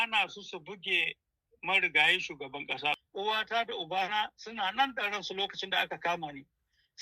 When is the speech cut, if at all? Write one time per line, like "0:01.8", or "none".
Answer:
0:03.0